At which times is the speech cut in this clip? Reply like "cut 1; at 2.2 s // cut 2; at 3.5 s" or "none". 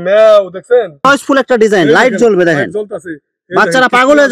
cut 1; at 0.9 s